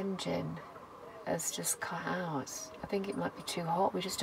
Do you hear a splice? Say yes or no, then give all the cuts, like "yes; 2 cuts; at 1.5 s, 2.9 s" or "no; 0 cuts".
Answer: no; 0 cuts